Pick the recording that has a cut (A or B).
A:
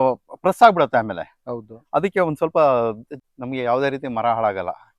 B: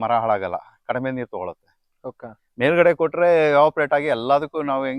A